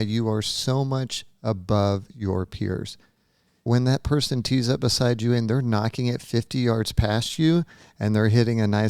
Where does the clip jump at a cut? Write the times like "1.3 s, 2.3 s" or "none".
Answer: 3.6 s